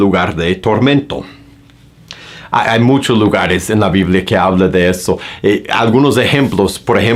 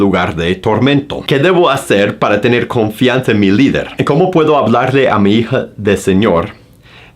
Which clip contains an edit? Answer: second; 2 cuts; at 1.2 s, 3.9 s

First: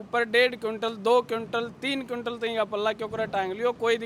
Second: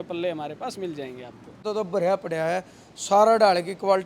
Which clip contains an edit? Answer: second; 1 cut; at 1.6 s

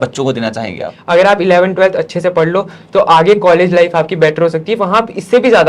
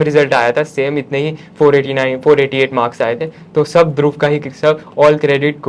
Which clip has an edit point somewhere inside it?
first; 1 cut; at 0.9 s

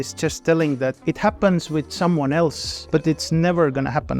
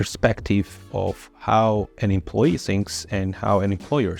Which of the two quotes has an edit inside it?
first; 2 cuts; at 1.0 s, 2.7 s

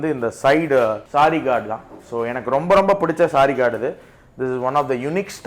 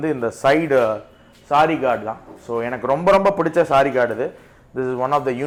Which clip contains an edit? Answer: first; 1 cut; at 1.0 s

